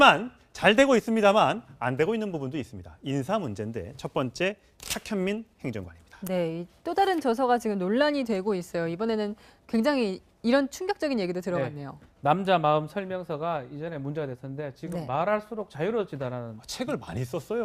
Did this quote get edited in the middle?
no; 0 cuts

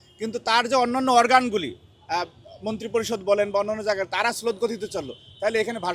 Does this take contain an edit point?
no; 0 cuts

